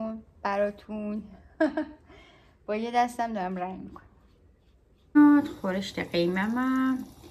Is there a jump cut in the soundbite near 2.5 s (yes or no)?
no